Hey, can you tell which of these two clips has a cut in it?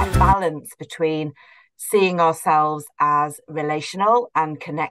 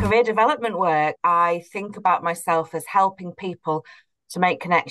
second; 1 cut; at 1.2 s

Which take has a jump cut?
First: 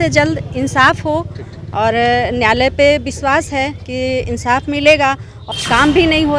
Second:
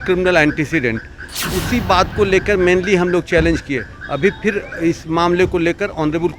first; 1 cut; at 5.3 s

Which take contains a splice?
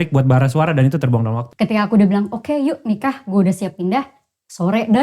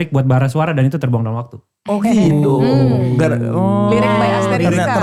first; 1 cut; at 1.4 s

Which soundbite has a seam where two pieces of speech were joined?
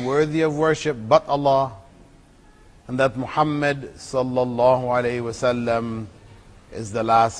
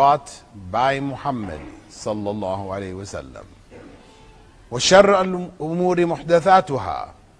first; 1 cut; at 4.0 s

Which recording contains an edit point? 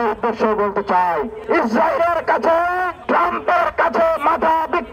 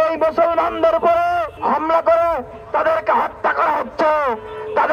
second; 1 cut; at 1.5 s

